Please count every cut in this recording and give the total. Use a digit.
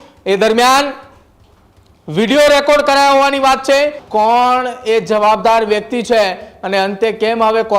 1